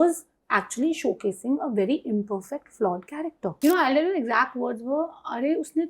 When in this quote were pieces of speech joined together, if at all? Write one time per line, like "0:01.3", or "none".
0:03.5